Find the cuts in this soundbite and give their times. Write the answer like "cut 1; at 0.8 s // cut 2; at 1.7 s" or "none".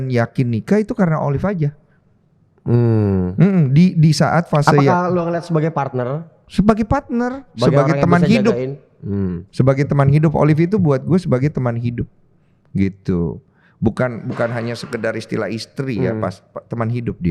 none